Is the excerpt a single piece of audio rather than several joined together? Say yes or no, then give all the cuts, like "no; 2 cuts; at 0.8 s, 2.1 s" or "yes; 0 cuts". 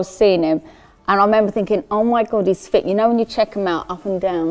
yes; 0 cuts